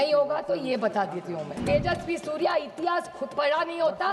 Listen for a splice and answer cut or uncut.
cut